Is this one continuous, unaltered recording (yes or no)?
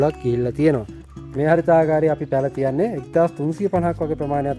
no